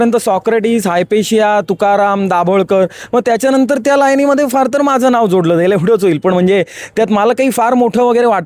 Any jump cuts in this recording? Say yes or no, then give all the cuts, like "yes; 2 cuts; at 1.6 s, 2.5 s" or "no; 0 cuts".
no; 0 cuts